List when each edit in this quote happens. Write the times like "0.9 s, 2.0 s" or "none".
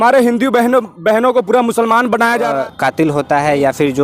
2.5 s